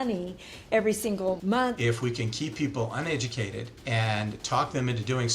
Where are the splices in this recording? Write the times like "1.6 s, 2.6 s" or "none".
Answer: 1.6 s, 3.7 s